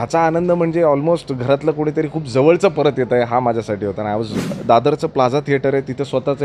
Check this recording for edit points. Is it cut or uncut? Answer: cut